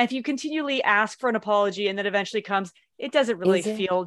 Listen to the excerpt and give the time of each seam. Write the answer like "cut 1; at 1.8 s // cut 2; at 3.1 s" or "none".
none